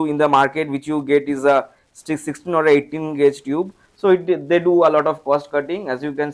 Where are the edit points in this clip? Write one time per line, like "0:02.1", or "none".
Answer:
none